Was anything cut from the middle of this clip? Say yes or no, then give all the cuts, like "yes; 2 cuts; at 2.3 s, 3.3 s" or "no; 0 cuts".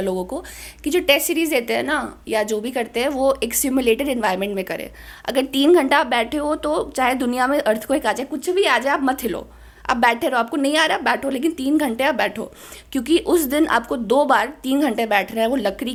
no; 0 cuts